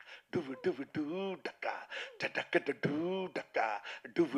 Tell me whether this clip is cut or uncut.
uncut